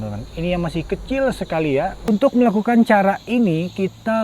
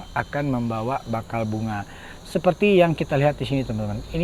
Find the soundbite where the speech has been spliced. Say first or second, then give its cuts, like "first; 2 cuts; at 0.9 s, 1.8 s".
first; 1 cut; at 2.0 s